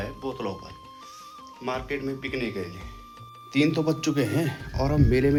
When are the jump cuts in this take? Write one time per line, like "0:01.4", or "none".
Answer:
none